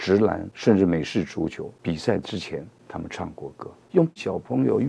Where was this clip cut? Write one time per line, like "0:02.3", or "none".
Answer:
0:01.7
0:02.8
0:03.8